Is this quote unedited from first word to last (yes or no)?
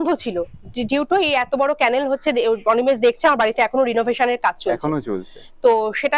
yes